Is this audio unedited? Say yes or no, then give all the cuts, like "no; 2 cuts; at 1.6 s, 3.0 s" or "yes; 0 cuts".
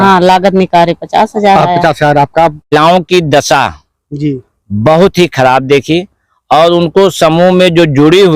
no; 1 cut; at 2.7 s